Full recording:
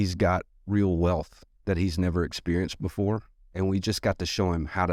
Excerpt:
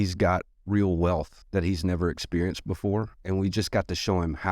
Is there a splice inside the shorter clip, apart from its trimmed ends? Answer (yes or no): yes